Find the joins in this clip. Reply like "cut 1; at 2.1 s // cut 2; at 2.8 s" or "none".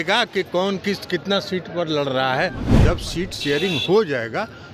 cut 1; at 2.6 s